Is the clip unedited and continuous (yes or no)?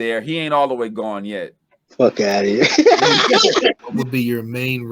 no